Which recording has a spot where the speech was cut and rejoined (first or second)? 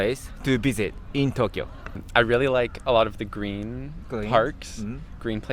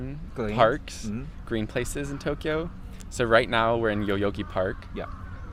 first